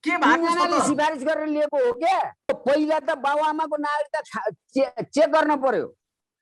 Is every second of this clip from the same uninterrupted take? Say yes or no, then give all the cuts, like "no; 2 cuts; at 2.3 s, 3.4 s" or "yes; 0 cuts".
no; 1 cut; at 2.5 s